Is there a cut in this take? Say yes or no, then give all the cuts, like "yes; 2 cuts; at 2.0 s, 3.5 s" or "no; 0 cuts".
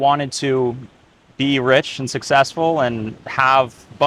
no; 0 cuts